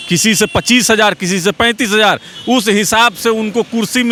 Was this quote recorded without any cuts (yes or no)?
yes